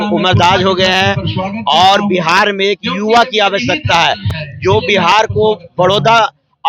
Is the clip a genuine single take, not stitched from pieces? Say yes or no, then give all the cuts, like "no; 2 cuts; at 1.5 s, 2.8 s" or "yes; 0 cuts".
yes; 0 cuts